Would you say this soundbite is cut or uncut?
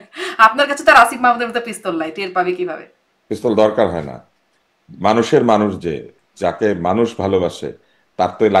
uncut